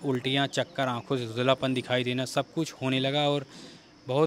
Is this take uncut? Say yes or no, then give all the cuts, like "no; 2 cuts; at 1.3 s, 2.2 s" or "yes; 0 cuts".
yes; 0 cuts